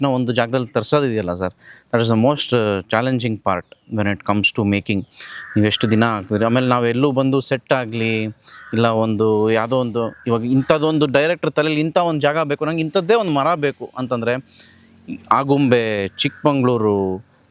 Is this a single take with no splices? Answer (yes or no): yes